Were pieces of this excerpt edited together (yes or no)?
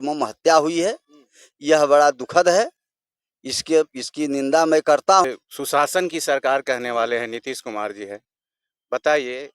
yes